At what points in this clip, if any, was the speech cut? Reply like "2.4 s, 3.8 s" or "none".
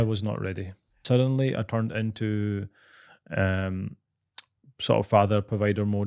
1.0 s